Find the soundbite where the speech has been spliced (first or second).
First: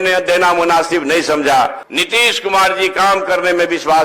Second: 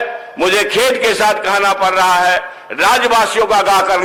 first